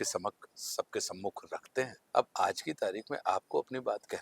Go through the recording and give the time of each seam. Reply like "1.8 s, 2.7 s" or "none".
2.0 s